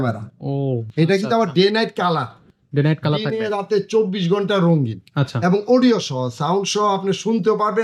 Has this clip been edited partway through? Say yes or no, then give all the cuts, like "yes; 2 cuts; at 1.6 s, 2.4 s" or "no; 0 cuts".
no; 0 cuts